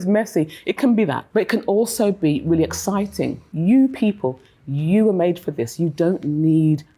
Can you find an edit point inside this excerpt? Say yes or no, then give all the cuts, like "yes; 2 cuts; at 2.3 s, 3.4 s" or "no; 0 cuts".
yes; 2 cuts; at 1.2 s, 3.5 s